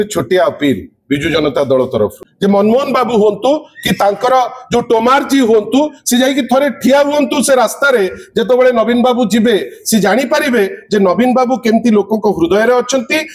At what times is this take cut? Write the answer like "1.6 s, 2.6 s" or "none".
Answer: 2.3 s